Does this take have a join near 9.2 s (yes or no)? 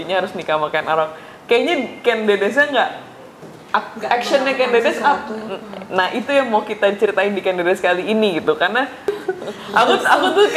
yes